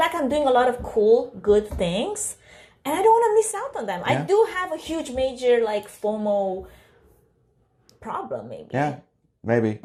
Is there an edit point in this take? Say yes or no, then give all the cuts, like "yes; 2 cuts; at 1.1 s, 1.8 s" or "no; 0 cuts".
no; 0 cuts